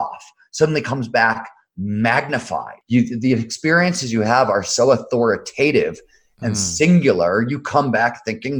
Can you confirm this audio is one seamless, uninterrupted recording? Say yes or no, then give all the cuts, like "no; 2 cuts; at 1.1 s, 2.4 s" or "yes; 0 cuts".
no; 1 cut; at 2.7 s